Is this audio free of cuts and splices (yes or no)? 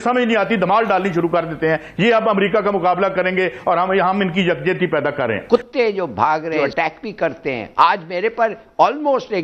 no